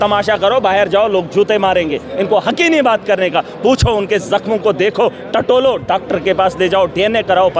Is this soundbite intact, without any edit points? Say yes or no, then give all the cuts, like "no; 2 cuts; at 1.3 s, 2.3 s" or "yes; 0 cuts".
yes; 0 cuts